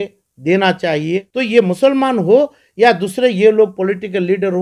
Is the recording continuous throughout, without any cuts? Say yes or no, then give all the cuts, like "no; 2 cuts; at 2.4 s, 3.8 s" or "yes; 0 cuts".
no; 1 cut; at 1.3 s